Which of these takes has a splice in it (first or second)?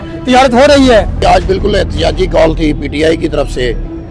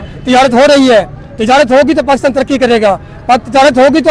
first